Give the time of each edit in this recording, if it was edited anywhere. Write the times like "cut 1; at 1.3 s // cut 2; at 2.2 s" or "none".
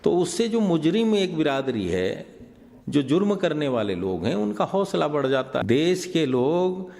cut 1; at 5.6 s